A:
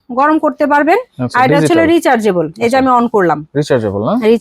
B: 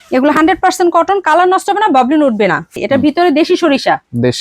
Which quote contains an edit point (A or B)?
B